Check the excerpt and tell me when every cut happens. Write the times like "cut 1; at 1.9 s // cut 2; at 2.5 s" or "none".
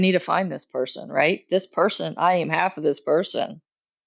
none